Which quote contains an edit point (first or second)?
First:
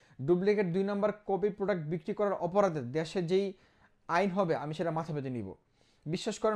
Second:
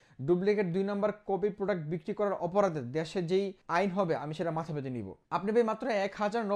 second